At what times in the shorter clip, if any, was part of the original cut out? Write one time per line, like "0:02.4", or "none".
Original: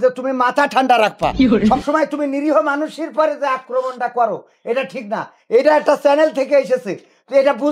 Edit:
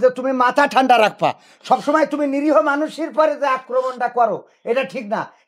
none